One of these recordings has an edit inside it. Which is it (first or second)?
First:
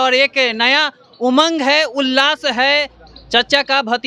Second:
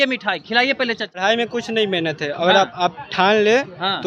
second